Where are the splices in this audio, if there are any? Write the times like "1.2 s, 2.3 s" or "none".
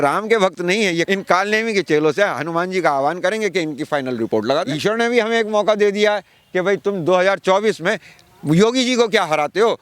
1.1 s, 4.7 s